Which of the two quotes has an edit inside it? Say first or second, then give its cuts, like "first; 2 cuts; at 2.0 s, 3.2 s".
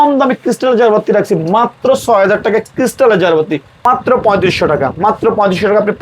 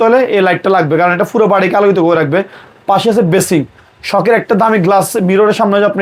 first; 1 cut; at 3.8 s